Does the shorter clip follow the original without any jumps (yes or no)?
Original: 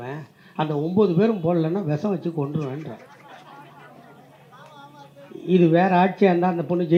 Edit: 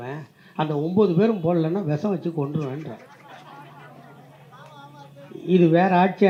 yes